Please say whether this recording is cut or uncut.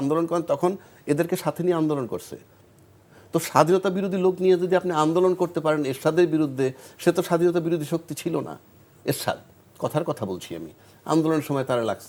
uncut